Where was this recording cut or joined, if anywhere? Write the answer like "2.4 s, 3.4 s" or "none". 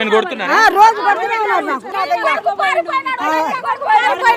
1.9 s

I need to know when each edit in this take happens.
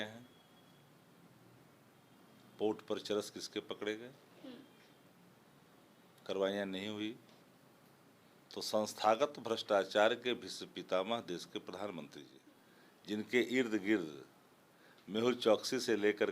12.3 s

